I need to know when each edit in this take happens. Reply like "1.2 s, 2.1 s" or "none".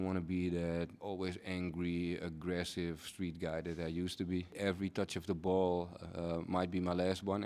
1.0 s, 4.6 s

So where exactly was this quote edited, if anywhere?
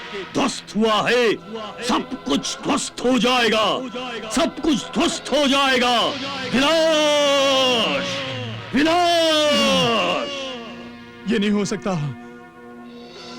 none

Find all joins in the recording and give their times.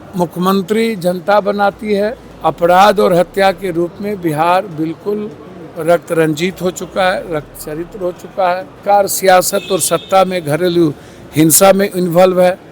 2.3 s, 8.8 s

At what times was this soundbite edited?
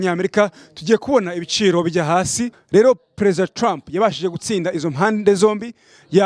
2.5 s

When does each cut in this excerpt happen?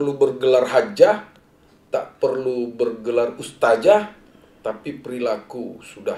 none

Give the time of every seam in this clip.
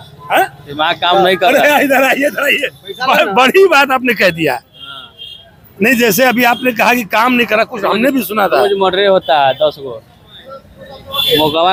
none

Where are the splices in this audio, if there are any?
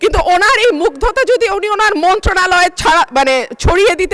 none

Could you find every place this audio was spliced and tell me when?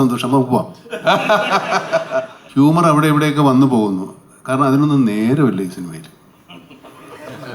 2.4 s

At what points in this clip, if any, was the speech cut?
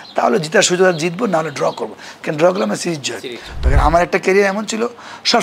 3.6 s

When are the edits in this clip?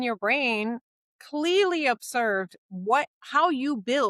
none

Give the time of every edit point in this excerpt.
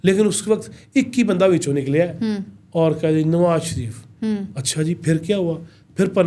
none

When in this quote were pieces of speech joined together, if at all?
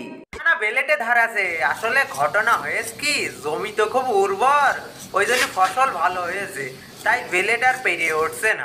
none

